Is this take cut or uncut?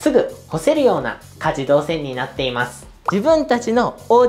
cut